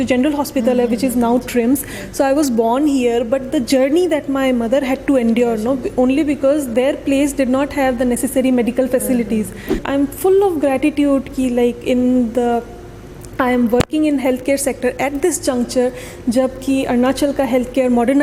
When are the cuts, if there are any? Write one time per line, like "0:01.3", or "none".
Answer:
0:09.8

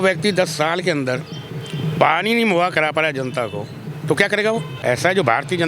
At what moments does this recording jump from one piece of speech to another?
0:04.7

